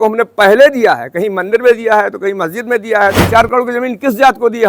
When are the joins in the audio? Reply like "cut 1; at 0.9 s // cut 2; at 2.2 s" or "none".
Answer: cut 1; at 3.2 s